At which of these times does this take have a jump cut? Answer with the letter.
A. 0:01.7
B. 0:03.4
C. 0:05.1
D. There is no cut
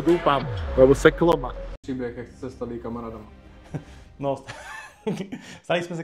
A